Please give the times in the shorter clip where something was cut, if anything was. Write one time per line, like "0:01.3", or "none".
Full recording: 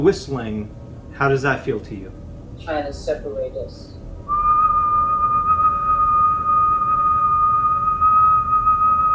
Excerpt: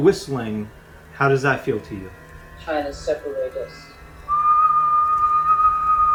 none